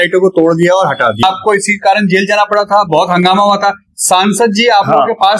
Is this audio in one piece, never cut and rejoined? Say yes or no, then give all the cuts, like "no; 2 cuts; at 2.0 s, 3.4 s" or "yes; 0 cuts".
no; 1 cut; at 1.2 s